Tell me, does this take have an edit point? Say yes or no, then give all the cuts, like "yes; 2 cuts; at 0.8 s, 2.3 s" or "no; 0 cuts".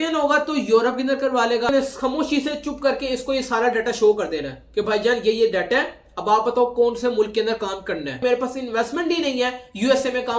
yes; 2 cuts; at 1.7 s, 8.2 s